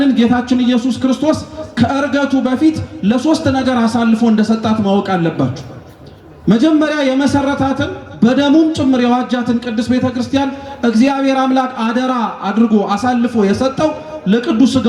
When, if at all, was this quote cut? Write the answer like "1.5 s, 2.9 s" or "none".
none